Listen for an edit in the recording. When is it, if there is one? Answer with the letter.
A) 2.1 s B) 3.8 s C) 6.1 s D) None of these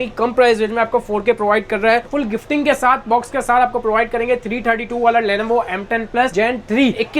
A